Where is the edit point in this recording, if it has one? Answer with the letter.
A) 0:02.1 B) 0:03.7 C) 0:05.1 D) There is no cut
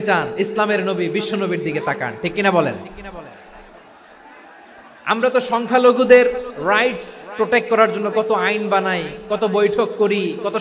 D